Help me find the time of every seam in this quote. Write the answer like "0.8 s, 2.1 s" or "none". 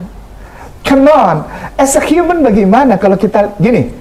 none